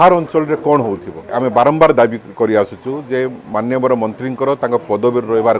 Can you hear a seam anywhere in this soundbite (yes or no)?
yes